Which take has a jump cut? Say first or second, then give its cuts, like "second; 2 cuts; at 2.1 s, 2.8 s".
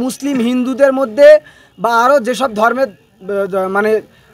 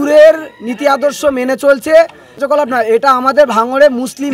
second; 1 cut; at 2.4 s